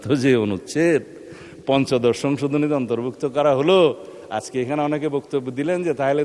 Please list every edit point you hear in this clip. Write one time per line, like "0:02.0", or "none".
none